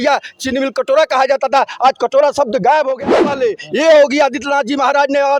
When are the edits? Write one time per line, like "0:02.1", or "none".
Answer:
0:03.0